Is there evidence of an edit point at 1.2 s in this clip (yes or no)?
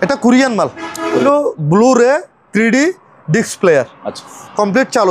yes